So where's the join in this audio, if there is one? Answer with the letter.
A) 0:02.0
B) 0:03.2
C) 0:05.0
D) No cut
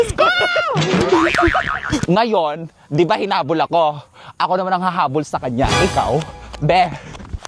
A